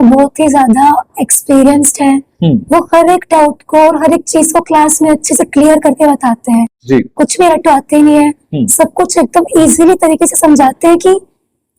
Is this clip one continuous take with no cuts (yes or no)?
yes